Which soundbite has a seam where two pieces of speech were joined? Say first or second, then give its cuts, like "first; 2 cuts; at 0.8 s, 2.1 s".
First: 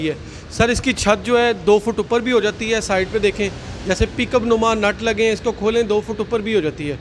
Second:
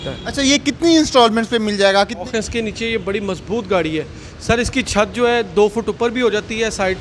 second; 1 cut; at 2.2 s